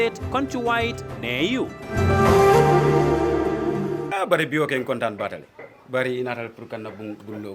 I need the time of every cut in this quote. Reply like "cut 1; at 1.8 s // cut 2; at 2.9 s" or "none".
cut 1; at 4.2 s